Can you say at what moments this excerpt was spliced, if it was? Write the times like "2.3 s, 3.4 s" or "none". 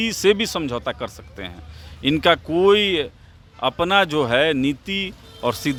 none